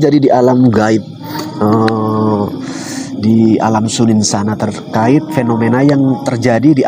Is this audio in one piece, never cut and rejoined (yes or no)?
yes